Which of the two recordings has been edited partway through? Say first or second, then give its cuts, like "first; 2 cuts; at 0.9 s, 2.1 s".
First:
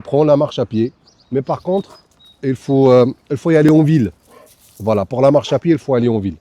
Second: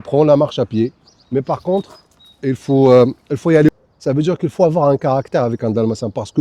second; 1 cut; at 3.7 s